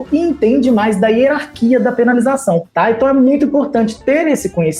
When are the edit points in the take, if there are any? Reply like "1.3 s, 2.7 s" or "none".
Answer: 2.7 s